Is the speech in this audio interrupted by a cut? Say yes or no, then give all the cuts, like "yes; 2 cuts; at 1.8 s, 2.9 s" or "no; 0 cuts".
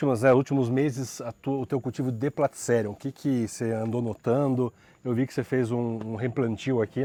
no; 0 cuts